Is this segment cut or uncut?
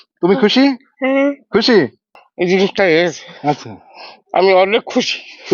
cut